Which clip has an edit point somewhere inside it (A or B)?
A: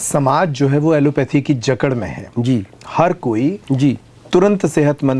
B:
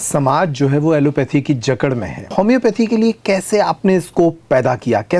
B